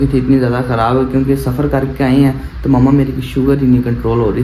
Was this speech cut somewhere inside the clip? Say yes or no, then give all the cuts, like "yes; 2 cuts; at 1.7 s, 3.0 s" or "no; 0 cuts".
no; 0 cuts